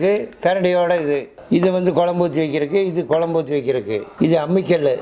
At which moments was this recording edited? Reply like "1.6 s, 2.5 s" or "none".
1.3 s, 4.1 s